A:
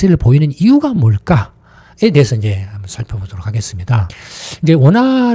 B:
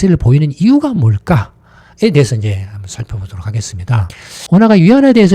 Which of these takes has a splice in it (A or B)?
B